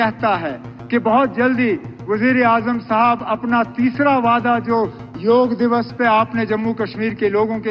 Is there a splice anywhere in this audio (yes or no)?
no